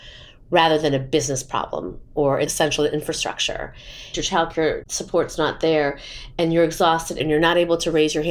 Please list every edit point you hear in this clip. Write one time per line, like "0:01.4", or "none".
0:04.1
0:07.2